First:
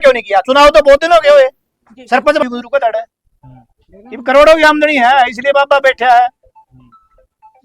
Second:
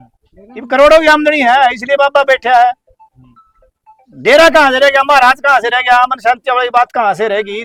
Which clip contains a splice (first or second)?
first